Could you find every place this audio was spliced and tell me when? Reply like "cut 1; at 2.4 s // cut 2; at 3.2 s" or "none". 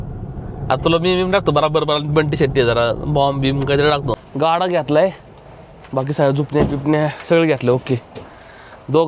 cut 1; at 4.3 s